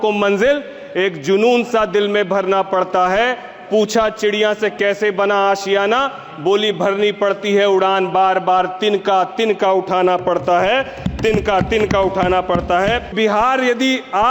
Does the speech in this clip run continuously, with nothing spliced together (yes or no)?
no